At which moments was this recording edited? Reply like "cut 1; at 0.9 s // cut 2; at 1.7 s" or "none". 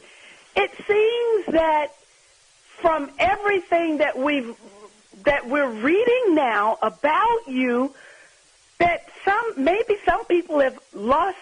cut 1; at 7.2 s